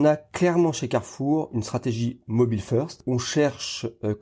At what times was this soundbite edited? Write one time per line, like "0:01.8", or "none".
0:03.0